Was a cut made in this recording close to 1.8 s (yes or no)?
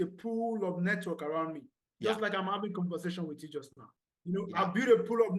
no